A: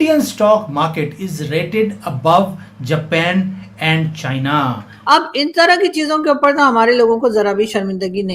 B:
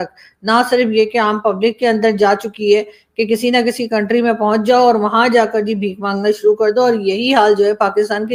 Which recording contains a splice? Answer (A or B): A